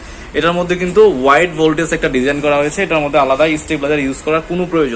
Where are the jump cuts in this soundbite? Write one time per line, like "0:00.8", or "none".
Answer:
none